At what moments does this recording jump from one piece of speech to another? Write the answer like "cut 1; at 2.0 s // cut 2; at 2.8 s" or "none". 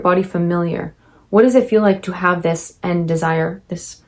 none